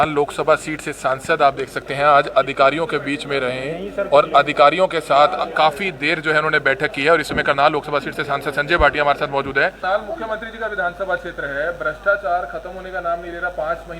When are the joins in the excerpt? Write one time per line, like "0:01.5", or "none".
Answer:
0:09.8

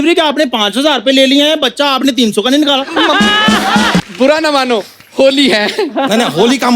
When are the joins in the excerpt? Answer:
0:04.0

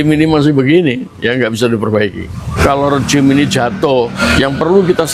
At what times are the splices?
0:02.6
0:04.2

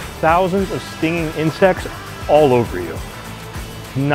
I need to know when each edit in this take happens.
none

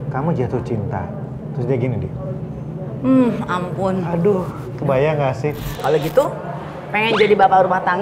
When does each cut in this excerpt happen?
0:05.7

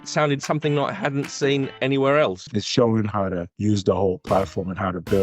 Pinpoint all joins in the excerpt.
0:02.4

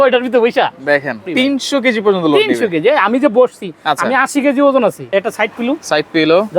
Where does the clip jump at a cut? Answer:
0:01.2
0:05.0

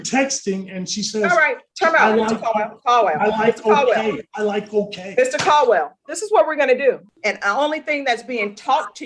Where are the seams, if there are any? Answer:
0:07.1

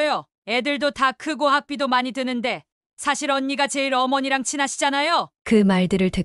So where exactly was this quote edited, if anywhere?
none

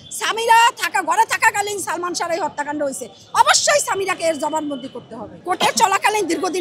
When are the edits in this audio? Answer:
0:05.3

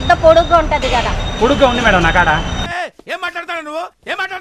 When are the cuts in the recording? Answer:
none

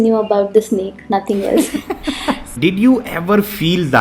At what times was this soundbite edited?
0:02.5

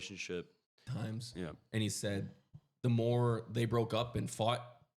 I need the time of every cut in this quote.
0:00.9

